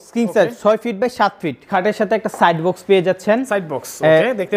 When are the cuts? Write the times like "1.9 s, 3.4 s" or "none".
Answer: 1.7 s